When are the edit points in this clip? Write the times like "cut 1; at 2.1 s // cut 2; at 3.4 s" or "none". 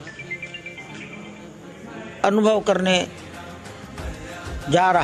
none